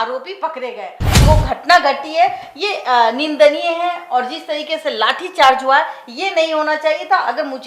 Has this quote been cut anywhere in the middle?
yes; 1 cut; at 1.2 s

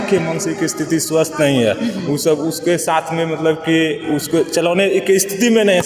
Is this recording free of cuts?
yes; 0 cuts

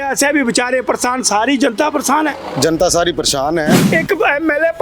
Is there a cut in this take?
yes; 1 cut; at 3.8 s

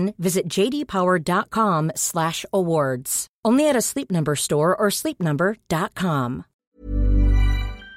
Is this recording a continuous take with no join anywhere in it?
no; 1 cut; at 6.5 s

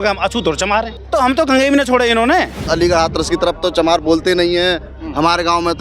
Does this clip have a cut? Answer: yes; 2 cuts; at 1.0 s, 2.6 s

